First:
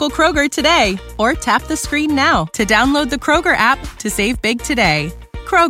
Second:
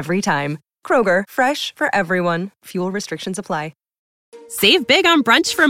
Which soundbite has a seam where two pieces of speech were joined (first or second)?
second